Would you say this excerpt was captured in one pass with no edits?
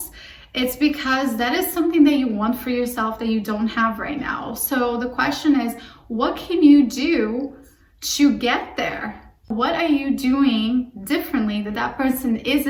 yes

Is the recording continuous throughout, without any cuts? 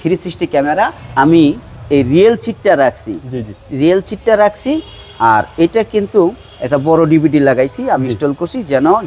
no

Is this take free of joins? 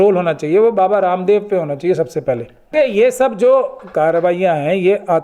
no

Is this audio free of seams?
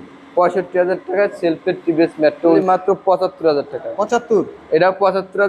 no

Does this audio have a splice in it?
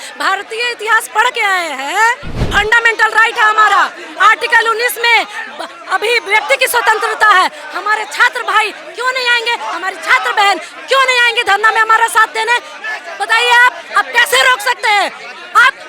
yes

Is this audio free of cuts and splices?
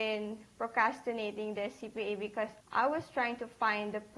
no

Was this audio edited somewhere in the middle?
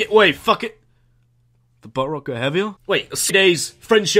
no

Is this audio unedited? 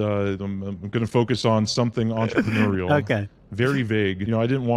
yes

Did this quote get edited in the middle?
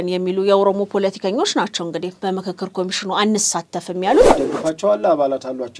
yes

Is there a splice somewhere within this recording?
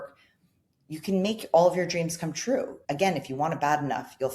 yes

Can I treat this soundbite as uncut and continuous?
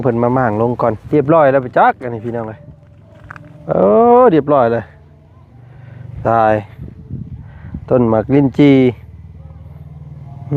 no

